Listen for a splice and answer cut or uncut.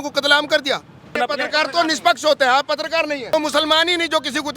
cut